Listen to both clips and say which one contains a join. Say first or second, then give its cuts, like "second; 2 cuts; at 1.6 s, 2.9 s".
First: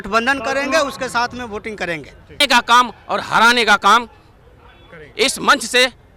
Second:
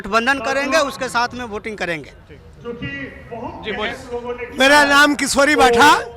first; 1 cut; at 2.4 s